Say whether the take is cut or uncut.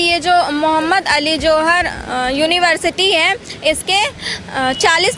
uncut